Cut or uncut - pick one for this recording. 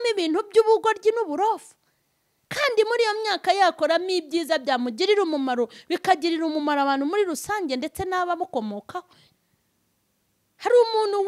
cut